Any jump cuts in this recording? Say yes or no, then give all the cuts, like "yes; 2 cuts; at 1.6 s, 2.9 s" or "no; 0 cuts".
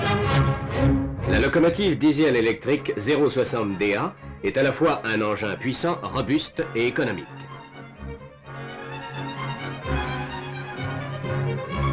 no; 0 cuts